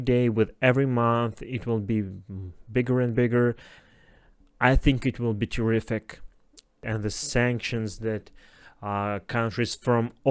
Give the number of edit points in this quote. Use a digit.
2